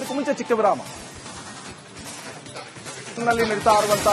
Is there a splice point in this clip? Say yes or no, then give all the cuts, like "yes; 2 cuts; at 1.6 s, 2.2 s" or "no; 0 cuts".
yes; 1 cut; at 3.2 s